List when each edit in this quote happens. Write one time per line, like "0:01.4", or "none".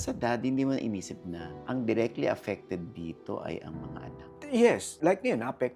none